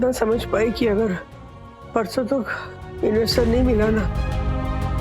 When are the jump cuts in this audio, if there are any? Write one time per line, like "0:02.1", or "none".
0:04.1